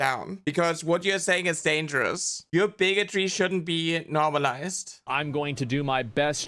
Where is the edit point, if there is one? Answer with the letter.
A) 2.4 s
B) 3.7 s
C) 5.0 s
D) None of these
C